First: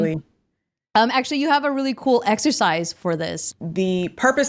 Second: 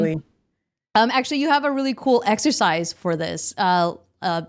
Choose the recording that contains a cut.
first; 1 cut; at 3.4 s

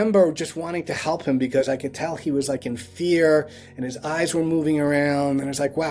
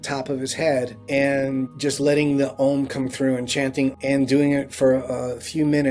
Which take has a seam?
second; 3 cuts; at 1.0 s, 1.7 s, 4.0 s

